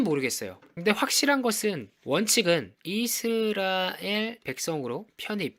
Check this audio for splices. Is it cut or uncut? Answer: uncut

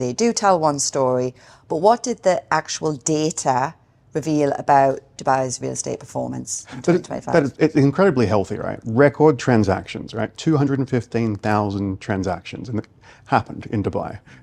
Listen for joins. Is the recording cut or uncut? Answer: uncut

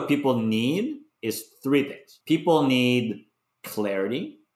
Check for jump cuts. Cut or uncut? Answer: uncut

